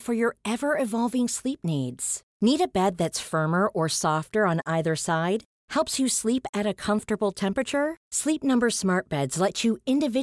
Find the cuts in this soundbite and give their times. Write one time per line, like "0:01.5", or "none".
none